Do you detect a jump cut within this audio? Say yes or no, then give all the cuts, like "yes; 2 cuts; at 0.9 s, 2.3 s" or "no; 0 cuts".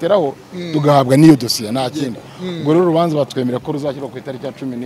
no; 0 cuts